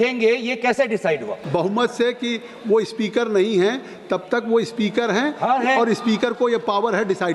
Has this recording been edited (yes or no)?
yes